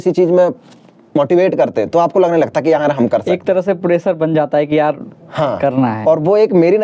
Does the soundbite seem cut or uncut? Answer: uncut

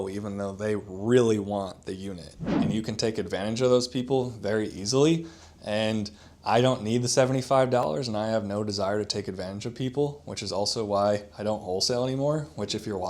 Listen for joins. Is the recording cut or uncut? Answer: cut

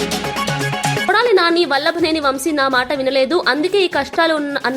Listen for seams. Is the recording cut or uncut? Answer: cut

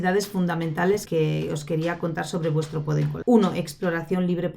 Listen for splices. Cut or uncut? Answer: cut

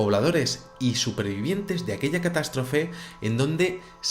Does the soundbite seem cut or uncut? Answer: cut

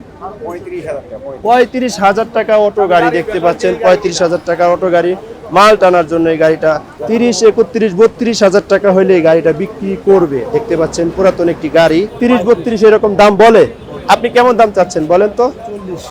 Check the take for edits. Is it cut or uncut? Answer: cut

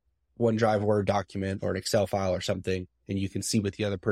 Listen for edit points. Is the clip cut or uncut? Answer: uncut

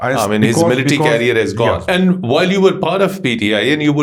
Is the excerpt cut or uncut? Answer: cut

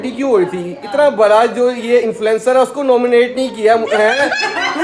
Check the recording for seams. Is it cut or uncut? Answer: uncut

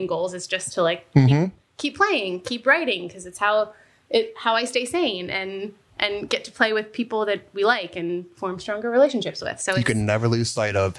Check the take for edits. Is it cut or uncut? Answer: uncut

